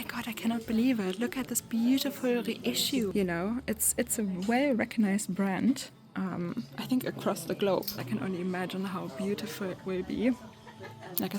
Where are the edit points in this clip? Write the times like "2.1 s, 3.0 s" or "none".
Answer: 3.1 s, 8.0 s